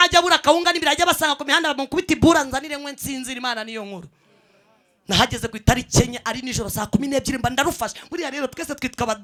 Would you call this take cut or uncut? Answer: uncut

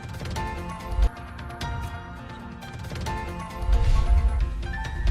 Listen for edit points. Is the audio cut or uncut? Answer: cut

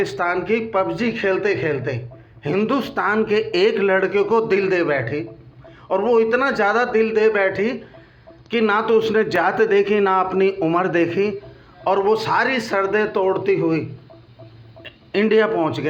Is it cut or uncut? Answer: uncut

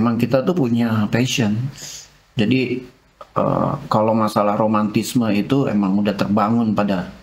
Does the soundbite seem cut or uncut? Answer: uncut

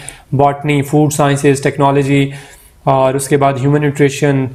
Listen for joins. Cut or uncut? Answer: uncut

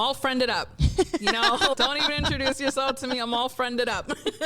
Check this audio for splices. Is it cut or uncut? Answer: uncut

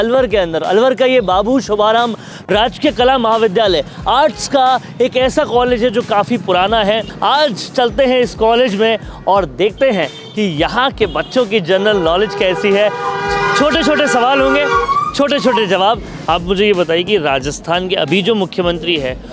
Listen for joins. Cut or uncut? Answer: cut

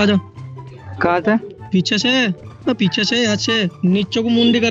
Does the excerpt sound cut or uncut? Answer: cut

